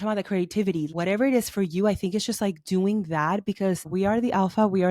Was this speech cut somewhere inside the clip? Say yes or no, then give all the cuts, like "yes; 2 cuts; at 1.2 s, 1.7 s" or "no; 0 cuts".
yes; 2 cuts; at 0.9 s, 3.9 s